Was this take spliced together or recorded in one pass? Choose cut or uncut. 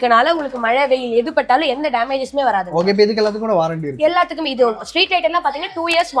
uncut